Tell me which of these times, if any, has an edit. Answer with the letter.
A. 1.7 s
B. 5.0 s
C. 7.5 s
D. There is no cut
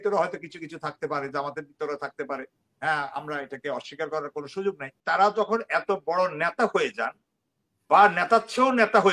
B